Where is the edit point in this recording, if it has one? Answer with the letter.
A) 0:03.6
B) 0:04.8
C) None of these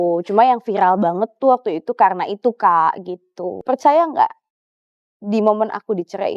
A